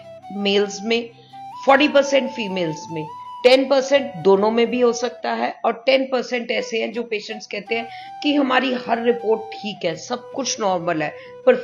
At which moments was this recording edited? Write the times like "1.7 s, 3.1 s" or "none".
none